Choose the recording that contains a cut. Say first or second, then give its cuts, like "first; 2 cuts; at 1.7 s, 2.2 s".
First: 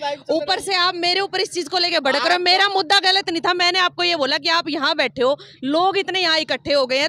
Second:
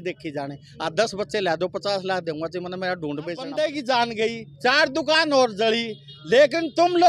second; 1 cut; at 3.5 s